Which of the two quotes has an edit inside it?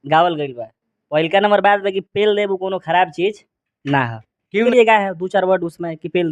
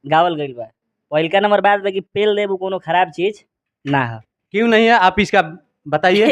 first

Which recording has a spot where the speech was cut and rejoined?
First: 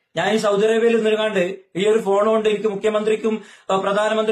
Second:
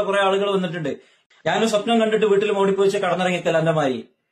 second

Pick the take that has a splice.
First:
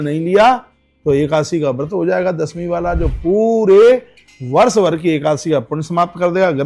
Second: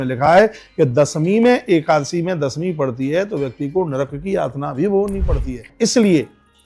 second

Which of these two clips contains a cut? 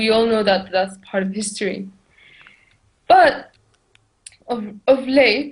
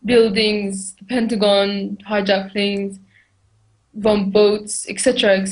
second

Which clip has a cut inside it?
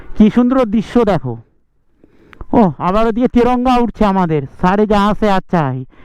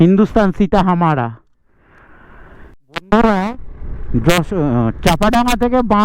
second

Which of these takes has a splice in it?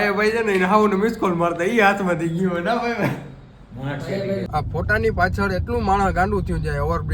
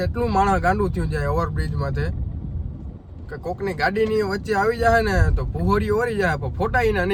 first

